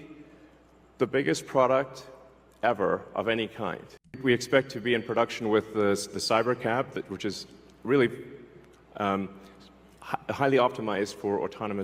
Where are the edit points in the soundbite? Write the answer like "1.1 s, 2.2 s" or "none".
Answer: 4.2 s